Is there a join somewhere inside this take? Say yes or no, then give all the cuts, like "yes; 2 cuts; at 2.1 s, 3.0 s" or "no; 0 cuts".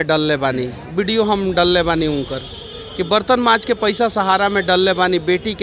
no; 0 cuts